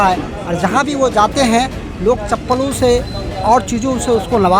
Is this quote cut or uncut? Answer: uncut